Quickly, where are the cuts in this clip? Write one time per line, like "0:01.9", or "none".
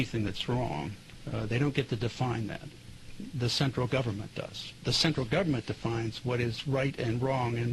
0:04.8